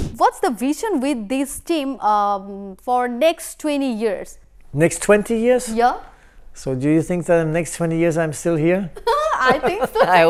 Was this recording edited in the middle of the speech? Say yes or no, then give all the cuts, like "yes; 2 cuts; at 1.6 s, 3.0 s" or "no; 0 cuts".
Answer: no; 0 cuts